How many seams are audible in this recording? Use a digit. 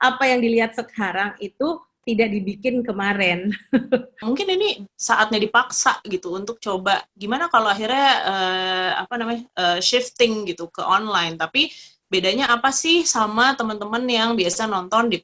1